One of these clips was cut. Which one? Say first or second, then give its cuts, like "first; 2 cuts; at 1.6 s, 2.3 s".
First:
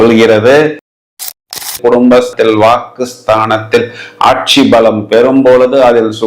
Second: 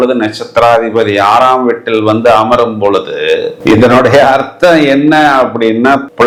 first; 1 cut; at 1.1 s